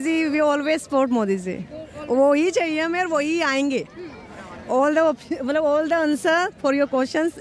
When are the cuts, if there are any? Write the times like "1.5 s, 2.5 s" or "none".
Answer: none